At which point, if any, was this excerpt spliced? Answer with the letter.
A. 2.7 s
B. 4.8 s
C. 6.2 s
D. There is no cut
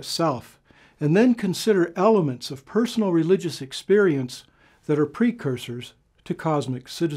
D